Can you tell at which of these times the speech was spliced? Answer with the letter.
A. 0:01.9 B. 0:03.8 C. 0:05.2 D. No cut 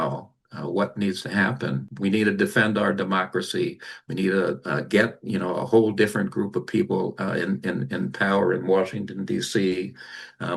A